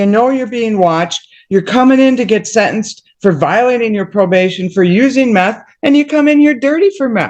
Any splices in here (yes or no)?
no